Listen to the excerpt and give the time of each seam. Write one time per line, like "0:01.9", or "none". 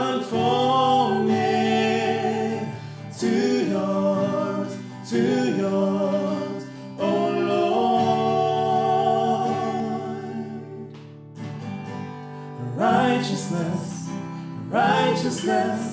none